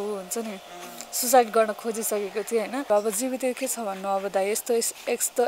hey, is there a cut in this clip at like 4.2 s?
no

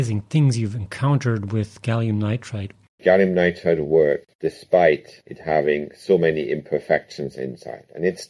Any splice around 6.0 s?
no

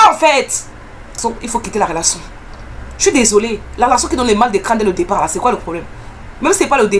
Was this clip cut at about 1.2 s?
yes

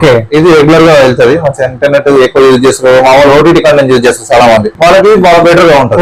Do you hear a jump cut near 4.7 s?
yes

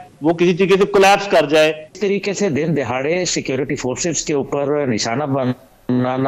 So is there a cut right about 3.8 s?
no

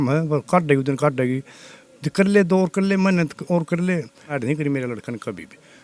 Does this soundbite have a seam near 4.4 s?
yes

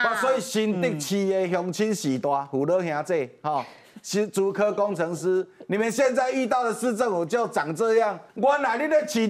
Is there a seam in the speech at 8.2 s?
yes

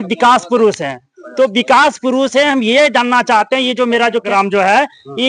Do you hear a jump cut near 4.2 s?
yes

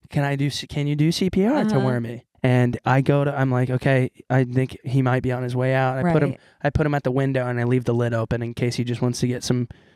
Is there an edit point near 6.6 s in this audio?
no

